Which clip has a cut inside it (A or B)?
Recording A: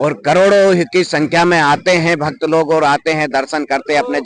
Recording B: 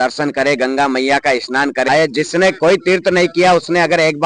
B